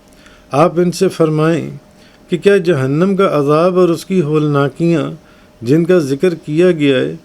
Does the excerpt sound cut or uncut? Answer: uncut